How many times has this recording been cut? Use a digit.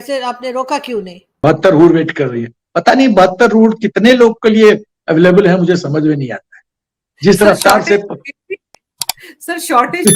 1